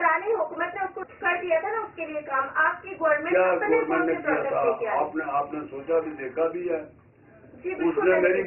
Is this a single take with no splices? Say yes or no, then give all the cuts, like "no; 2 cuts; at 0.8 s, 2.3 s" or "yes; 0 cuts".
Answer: yes; 0 cuts